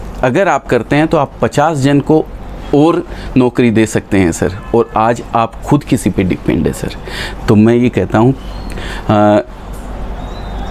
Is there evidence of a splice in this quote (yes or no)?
no